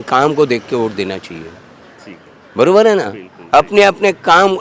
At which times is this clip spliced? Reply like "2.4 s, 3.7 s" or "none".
none